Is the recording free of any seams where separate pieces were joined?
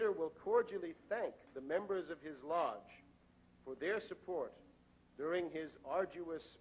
no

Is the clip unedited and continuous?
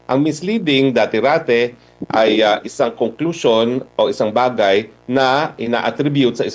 yes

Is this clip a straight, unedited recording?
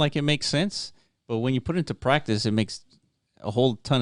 yes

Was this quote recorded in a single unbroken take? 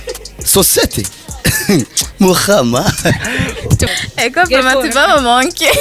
no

